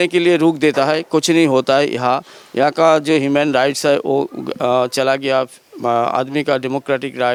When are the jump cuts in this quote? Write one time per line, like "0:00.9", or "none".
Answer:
none